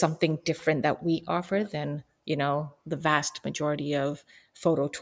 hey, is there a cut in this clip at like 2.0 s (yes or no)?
no